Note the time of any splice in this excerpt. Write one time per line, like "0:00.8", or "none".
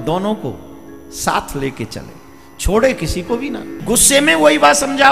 0:03.7